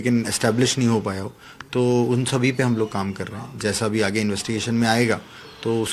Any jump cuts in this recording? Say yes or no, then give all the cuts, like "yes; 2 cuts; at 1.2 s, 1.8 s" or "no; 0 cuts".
no; 0 cuts